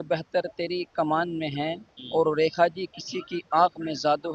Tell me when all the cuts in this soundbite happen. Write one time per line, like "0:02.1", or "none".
none